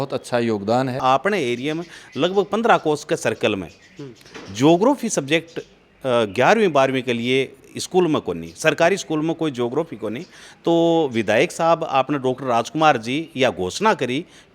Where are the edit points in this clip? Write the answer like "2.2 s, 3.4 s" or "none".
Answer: 1.0 s